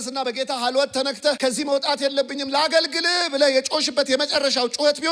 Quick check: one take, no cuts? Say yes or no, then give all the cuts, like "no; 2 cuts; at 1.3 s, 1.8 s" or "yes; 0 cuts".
no; 1 cut; at 1.4 s